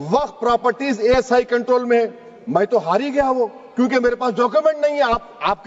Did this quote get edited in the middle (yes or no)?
no